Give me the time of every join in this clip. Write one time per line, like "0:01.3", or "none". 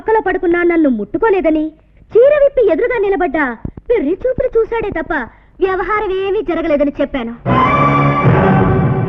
none